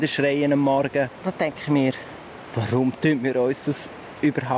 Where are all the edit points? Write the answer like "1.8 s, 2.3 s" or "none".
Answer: 1.1 s